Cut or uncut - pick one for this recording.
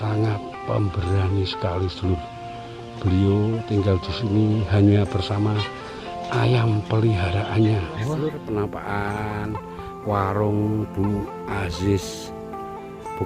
cut